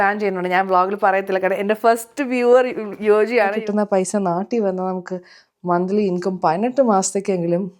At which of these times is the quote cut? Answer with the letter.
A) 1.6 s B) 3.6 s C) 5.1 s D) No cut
B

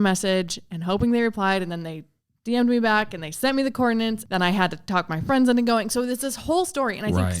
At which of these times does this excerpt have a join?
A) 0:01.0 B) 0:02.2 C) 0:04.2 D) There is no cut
C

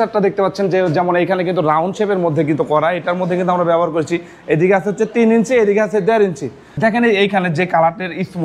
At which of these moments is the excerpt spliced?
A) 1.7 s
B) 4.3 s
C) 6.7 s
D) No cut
C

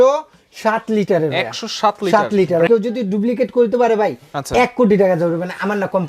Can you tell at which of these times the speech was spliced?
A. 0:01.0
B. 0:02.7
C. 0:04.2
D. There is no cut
B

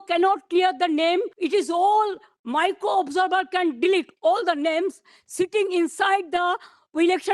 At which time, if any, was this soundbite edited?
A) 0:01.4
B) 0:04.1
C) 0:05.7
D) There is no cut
A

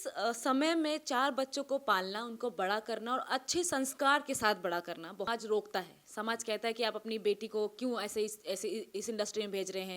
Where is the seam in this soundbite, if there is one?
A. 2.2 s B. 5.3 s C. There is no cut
B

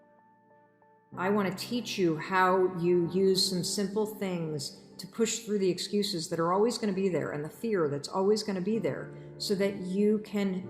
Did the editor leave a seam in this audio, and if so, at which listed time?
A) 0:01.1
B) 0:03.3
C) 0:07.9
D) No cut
A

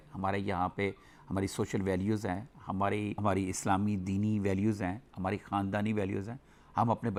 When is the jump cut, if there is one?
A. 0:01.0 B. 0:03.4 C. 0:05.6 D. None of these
D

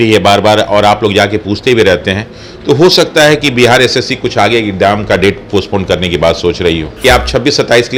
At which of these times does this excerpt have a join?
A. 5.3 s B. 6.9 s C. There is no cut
B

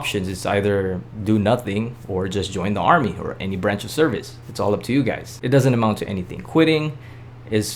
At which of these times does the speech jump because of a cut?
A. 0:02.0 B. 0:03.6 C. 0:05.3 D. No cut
C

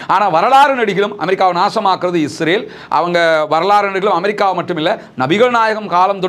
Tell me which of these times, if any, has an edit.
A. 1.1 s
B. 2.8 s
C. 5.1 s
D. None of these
D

